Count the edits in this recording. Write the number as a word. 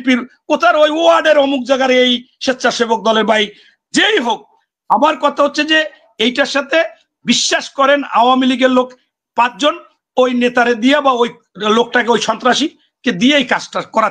zero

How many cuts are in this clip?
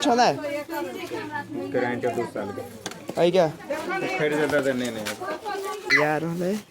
one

